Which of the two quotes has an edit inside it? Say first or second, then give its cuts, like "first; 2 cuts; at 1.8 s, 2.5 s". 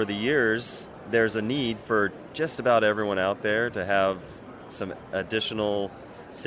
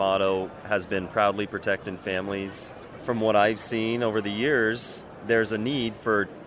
second; 1 cut; at 3.0 s